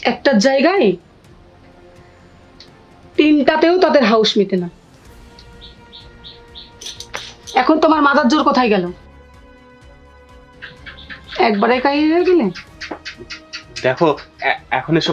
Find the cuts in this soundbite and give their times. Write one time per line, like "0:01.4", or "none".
none